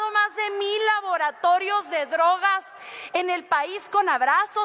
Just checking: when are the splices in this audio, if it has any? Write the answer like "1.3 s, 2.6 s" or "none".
none